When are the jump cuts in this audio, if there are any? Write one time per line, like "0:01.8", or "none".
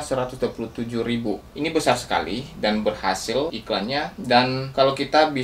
0:01.5
0:03.5
0:04.6